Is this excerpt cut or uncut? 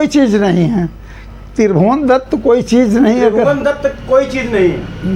uncut